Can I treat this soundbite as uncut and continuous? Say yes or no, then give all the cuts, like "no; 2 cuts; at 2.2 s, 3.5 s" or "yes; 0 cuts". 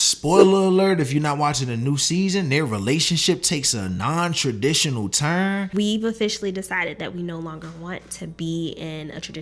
no; 1 cut; at 5.7 s